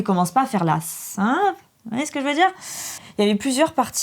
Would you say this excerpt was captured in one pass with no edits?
yes; 0 cuts

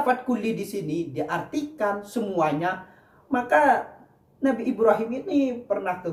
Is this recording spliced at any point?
no; 0 cuts

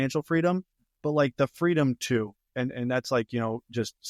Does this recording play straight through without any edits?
yes; 0 cuts

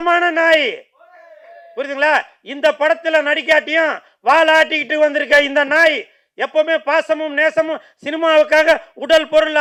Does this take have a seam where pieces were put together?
no; 0 cuts

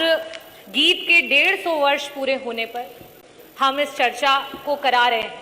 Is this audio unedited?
yes; 0 cuts

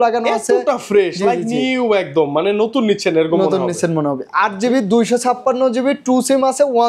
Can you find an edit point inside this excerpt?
no; 0 cuts

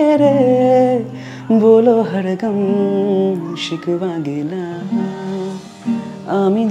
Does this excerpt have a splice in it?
yes; 1 cut; at 5.6 s

